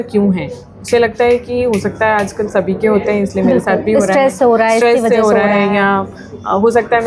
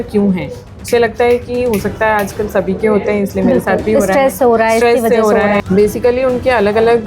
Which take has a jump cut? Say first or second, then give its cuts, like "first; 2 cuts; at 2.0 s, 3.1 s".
second; 1 cut; at 5.6 s